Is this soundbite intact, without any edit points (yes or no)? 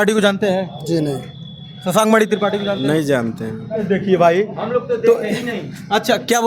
yes